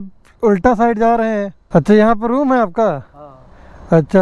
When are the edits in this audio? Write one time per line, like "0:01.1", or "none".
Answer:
none